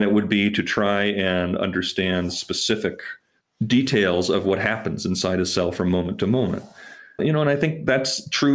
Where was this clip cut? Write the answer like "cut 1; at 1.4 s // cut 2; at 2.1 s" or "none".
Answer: none